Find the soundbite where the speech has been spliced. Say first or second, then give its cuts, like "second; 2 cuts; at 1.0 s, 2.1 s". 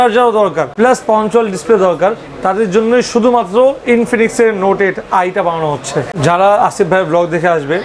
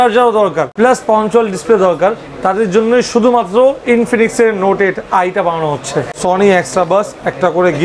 second; 1 cut; at 6.1 s